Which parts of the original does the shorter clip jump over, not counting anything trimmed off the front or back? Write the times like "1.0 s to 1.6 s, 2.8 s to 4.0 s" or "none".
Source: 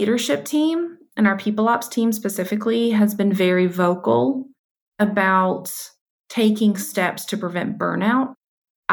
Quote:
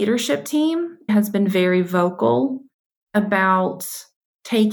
1.1 s to 2.9 s